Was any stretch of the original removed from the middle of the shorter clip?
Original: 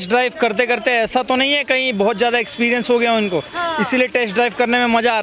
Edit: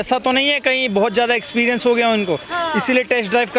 no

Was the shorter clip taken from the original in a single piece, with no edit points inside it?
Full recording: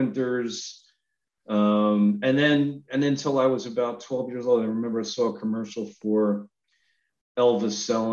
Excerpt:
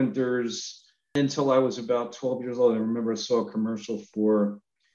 no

